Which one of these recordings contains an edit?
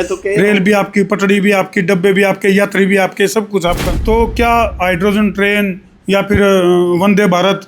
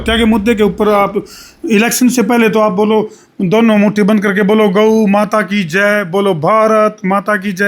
first; 1 cut; at 3.8 s

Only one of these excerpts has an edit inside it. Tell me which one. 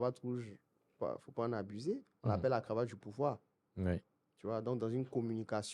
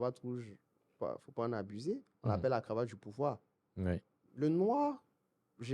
second; 1 cut; at 4.3 s

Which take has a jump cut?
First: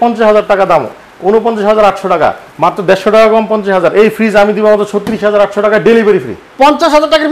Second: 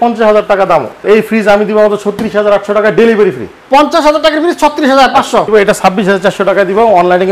second; 2 cuts; at 1.0 s, 5.5 s

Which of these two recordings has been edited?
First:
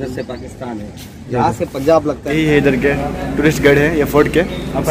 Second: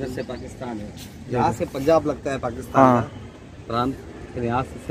first; 1 cut; at 2.3 s

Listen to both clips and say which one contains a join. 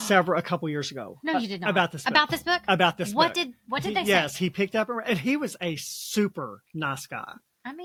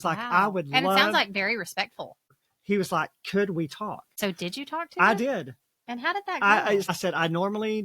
second; 3 cuts; at 2.2 s, 4.0 s, 6.9 s

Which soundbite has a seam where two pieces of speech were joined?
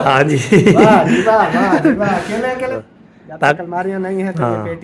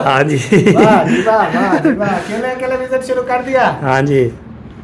first; 1 cut; at 2.8 s

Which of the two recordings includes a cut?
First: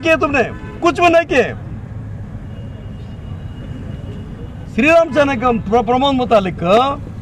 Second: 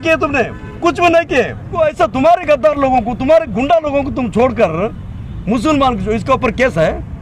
second; 1 cut; at 1.8 s

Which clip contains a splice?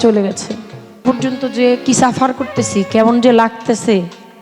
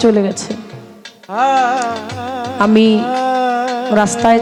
first; 1 cut; at 1.0 s

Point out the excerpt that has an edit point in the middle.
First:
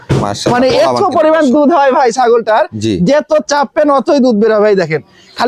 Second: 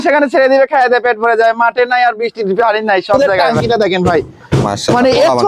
second; 1 cut; at 3.2 s

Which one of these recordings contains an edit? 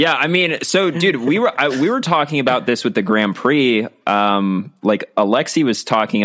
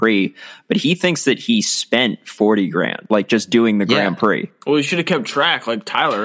second; 2 cuts; at 3.0 s, 4.5 s

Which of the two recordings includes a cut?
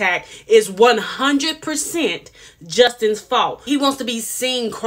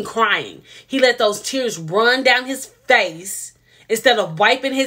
first; 1 cut; at 3.1 s

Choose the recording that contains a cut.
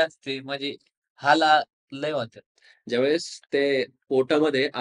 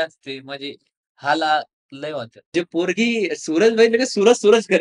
second; 1 cut; at 2.5 s

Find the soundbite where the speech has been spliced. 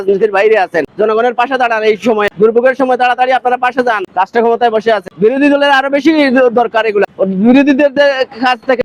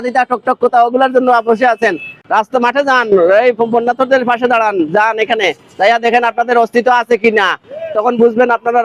first; 5 cuts; at 0.9 s, 2.3 s, 4.1 s, 5.0 s, 7.1 s

